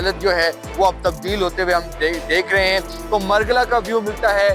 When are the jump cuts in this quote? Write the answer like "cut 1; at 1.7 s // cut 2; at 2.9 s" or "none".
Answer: cut 1; at 3.0 s